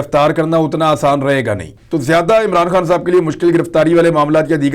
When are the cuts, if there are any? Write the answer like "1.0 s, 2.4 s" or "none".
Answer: 1.7 s